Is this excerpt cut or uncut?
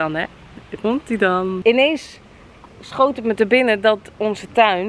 cut